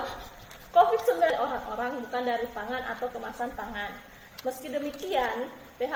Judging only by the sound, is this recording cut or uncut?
uncut